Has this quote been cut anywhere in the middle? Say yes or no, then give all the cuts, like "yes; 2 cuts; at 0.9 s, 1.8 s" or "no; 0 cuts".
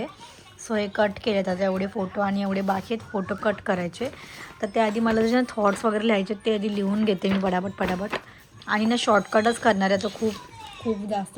no; 0 cuts